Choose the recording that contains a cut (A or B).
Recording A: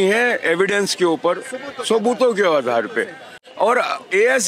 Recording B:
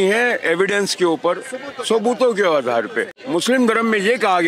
B